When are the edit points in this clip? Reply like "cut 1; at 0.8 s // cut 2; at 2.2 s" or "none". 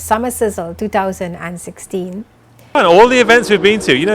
cut 1; at 2.8 s